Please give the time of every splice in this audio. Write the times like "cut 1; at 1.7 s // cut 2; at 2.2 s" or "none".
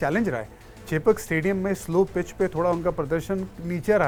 none